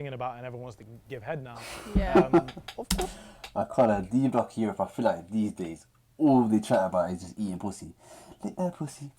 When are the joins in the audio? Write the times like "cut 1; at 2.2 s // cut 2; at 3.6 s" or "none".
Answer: cut 1; at 1.5 s